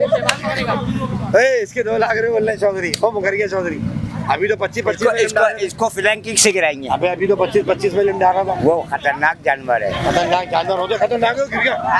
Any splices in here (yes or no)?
no